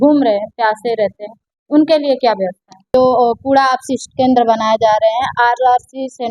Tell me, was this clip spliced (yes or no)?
yes